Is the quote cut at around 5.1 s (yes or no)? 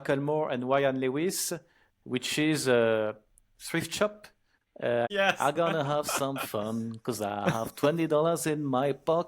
yes